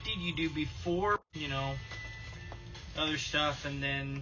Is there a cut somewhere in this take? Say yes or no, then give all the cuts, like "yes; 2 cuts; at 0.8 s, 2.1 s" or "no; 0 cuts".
yes; 1 cut; at 1.2 s